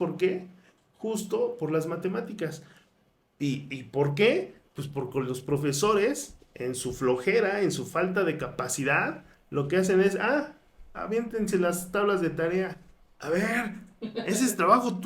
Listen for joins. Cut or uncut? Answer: uncut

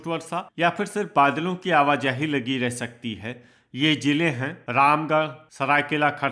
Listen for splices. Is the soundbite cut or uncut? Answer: cut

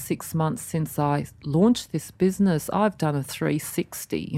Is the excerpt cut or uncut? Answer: uncut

